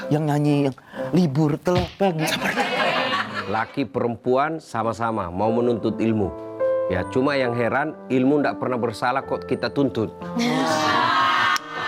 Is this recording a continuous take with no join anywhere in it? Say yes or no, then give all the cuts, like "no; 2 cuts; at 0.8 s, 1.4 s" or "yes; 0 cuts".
no; 1 cut; at 3.4 s